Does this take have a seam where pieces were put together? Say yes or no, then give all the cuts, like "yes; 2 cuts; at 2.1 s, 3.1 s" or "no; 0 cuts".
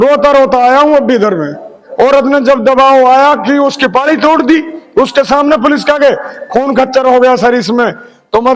yes; 1 cut; at 1.8 s